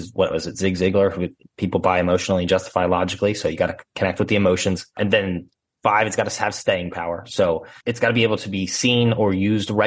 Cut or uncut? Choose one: cut